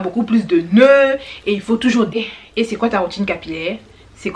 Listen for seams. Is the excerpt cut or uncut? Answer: cut